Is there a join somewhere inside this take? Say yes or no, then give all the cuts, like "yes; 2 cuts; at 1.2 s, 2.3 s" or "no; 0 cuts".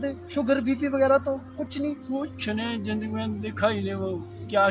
no; 0 cuts